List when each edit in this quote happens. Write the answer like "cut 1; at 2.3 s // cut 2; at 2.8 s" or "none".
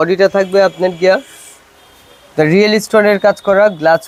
none